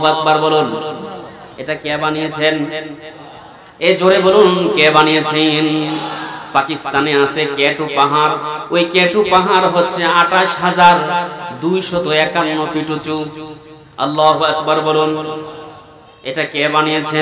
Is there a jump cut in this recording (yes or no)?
no